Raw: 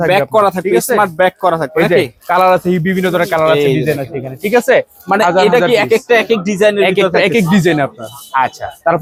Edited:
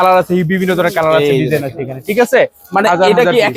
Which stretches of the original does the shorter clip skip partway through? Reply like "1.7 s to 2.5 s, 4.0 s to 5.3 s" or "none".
none